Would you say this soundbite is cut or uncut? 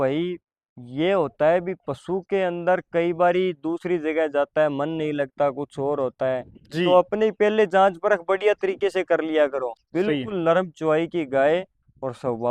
cut